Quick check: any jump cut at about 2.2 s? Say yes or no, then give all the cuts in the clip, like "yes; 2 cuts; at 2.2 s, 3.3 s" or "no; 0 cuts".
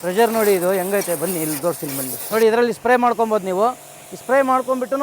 yes; 1 cut; at 2.2 s